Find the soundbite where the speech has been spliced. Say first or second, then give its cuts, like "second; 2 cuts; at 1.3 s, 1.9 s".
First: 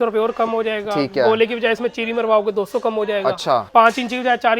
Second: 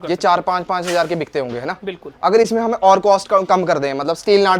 first; 1 cut; at 3.7 s